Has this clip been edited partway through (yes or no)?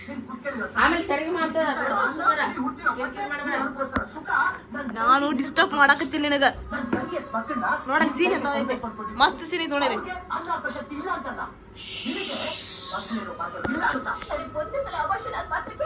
no